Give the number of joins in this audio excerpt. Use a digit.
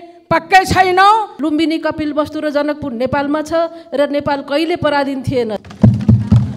2